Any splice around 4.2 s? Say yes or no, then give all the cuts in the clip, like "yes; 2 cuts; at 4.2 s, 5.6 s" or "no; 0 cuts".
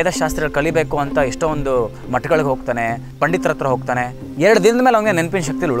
yes; 1 cut; at 4.2 s